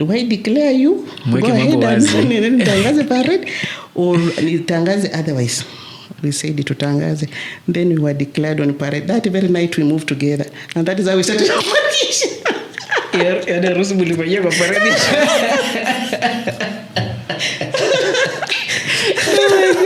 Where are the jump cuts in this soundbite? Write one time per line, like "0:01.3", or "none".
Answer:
none